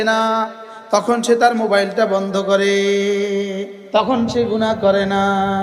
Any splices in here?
yes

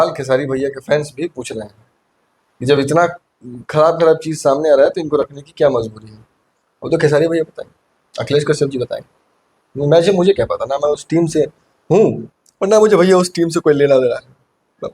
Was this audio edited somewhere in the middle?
no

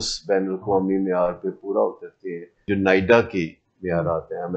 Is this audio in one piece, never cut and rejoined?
no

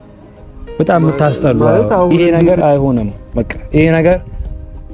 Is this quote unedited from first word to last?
no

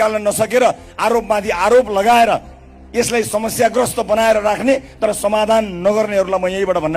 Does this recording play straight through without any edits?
yes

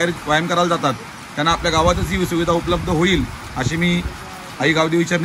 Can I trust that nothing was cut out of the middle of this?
yes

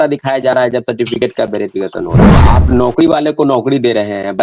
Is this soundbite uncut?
no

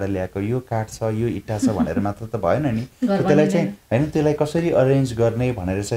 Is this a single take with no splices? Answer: yes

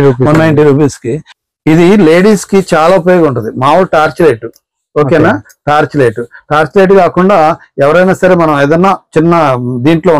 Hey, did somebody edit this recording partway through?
yes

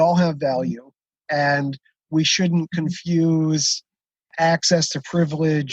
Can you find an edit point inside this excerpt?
yes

